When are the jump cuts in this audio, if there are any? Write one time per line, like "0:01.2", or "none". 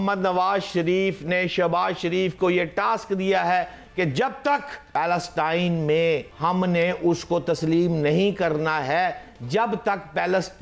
0:04.8
0:06.3